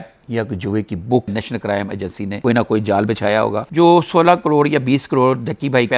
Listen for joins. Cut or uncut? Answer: cut